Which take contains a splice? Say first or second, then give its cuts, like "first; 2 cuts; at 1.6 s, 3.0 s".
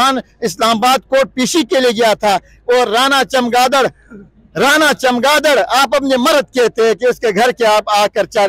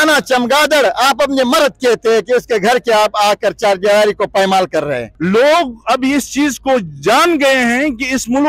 second; 1 cut; at 5.1 s